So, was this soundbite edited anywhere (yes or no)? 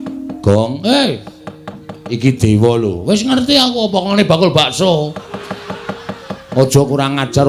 no